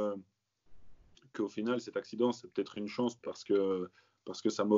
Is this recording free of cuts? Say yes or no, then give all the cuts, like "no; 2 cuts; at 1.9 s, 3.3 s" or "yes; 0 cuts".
yes; 0 cuts